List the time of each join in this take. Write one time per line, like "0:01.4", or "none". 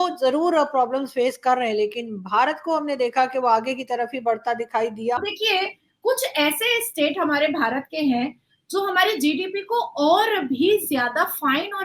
0:05.2